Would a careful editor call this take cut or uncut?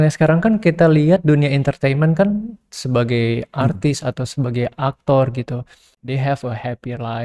uncut